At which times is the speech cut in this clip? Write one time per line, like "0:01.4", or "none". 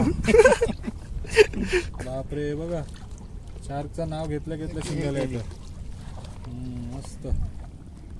0:01.9